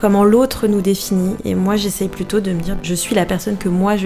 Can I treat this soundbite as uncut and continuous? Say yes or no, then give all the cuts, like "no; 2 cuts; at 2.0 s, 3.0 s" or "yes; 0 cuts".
no; 1 cut; at 2.8 s